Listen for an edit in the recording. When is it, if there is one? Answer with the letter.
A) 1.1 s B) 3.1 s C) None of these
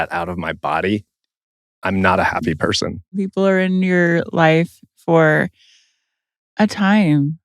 B